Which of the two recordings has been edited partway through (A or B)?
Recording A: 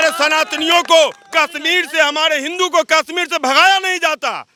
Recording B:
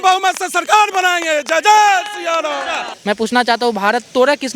B